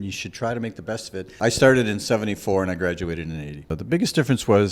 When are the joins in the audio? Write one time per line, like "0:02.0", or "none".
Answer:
0:01.3
0:03.7